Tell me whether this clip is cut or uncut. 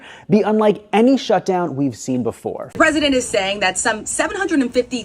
cut